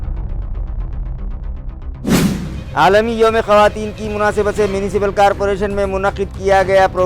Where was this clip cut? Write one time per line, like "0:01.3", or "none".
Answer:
0:02.6